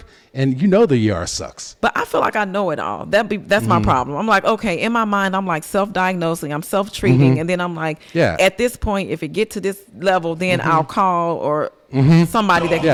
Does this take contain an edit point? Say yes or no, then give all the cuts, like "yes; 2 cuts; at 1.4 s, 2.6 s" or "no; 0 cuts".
no; 0 cuts